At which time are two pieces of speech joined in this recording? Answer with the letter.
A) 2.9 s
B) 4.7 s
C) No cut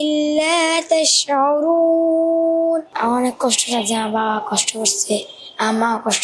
A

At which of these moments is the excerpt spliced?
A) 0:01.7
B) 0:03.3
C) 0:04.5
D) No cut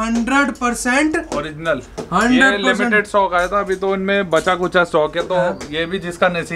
D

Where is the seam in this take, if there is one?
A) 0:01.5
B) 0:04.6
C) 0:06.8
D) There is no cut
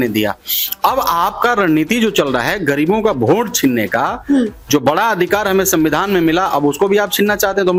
D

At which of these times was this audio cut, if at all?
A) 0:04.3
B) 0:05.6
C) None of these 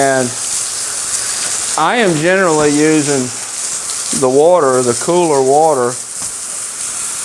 C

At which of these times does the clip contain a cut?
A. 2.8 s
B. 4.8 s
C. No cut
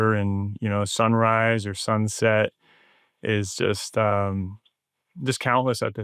C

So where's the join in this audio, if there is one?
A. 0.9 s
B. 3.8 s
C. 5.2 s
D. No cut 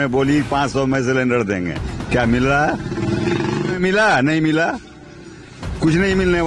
B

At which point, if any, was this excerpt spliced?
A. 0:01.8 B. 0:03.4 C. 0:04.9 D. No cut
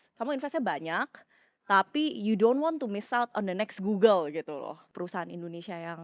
C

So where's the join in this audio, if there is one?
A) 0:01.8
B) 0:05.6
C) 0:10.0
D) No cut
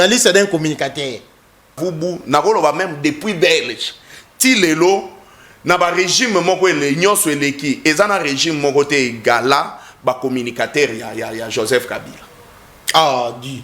A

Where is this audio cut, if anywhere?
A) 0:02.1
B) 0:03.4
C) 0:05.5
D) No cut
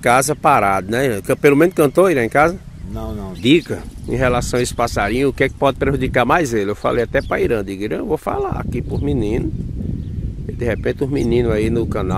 B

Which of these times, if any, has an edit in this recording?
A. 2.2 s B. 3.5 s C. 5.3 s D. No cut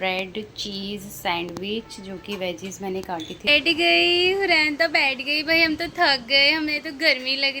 B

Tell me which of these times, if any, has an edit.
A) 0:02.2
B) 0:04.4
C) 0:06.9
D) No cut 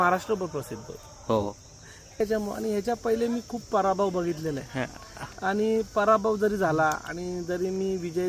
A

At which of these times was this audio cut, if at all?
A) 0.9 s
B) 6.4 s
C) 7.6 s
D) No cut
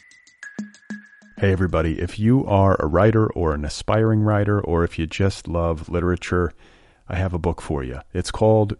A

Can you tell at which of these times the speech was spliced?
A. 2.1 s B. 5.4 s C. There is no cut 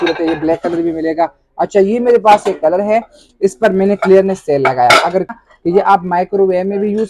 B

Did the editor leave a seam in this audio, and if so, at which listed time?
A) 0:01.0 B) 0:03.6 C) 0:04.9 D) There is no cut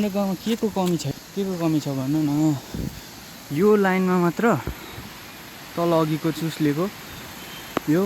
A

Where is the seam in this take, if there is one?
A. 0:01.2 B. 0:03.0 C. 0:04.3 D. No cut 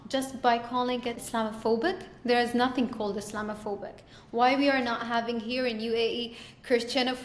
A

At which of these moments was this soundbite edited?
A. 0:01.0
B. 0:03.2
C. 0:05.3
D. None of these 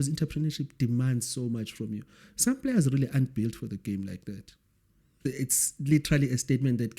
C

